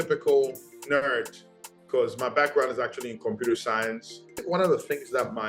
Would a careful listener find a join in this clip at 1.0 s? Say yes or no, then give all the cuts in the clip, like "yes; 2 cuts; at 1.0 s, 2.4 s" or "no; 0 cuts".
no; 1 cut; at 4.4 s